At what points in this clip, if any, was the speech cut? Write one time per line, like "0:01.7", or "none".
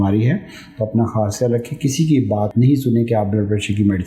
0:02.5